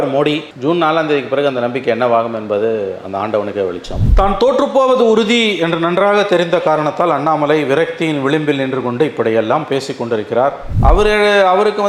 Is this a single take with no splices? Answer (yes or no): no